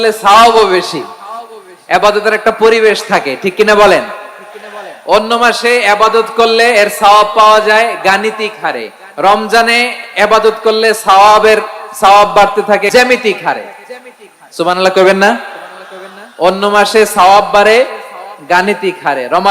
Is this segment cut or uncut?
cut